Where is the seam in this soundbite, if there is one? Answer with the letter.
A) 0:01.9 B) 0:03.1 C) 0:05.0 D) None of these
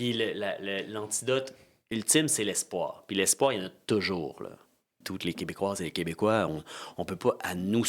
C